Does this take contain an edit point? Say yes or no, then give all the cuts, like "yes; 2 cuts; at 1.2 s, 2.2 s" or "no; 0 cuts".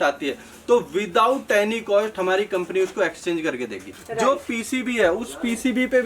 yes; 1 cut; at 4.0 s